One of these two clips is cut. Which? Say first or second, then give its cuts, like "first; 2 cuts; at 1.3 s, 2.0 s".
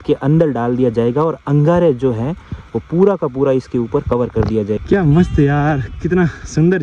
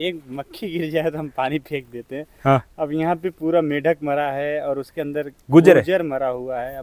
first; 1 cut; at 4.8 s